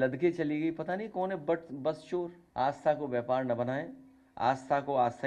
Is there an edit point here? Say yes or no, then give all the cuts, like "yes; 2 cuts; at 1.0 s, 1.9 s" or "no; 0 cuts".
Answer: yes; 1 cut; at 2.4 s